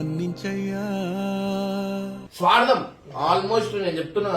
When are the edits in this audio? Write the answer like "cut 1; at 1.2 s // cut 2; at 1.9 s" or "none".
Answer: cut 1; at 2.2 s